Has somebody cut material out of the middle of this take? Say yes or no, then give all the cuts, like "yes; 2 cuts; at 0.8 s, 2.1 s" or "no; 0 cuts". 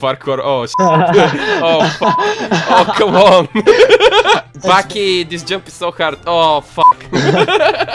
yes; 1 cut; at 4.6 s